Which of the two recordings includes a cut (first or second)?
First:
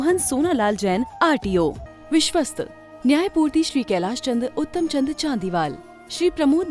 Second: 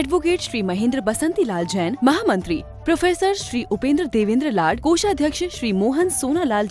first